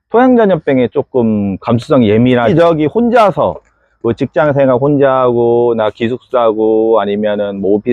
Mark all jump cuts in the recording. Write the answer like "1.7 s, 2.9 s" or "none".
2.5 s